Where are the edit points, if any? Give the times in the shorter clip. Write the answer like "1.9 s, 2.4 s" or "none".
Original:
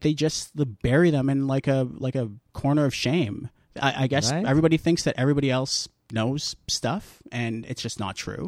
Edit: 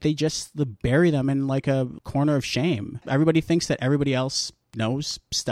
2.0 s, 3.1 s